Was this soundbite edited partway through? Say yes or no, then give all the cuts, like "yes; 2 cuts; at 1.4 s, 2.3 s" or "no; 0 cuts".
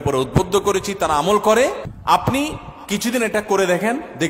yes; 1 cut; at 1.9 s